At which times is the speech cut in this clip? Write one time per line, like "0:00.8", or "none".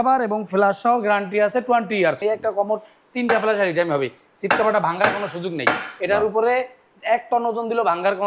0:02.2